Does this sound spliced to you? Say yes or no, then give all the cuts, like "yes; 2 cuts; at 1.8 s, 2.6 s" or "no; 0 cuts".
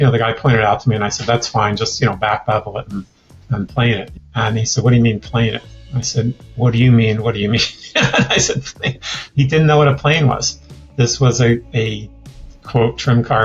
yes; 1 cut; at 4.1 s